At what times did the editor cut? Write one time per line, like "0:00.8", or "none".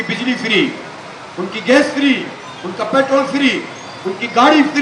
none